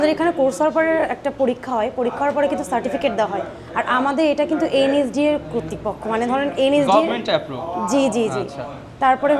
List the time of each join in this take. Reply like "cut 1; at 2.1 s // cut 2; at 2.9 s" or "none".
none